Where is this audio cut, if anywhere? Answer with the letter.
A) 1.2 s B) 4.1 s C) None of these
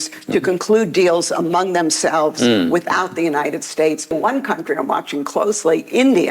B